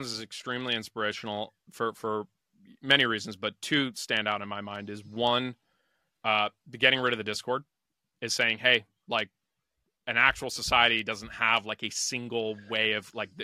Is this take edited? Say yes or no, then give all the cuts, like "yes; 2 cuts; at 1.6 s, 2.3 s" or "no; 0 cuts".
no; 0 cuts